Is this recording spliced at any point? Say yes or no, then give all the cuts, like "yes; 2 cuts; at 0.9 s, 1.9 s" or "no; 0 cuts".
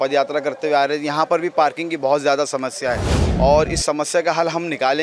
no; 0 cuts